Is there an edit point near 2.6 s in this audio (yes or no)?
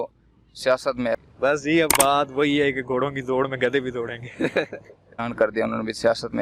no